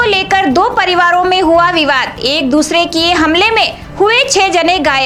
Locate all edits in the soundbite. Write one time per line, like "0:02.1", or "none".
none